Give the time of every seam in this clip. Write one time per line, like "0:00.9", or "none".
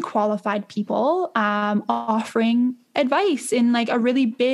none